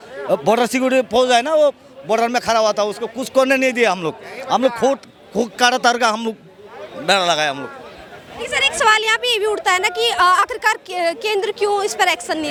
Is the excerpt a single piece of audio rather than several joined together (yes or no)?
yes